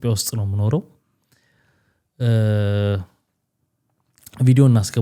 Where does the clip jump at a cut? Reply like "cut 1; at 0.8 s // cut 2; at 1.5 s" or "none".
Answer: none